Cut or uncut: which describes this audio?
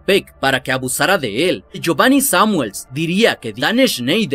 cut